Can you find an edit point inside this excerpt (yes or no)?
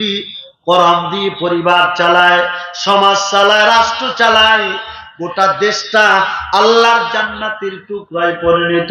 no